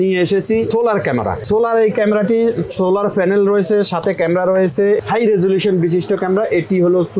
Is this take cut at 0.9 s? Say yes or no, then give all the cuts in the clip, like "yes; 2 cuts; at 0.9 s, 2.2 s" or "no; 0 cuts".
yes; 2 cuts; at 0.9 s, 5.0 s